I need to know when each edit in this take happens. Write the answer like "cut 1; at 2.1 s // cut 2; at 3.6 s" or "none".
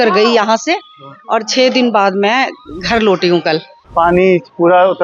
cut 1; at 3.8 s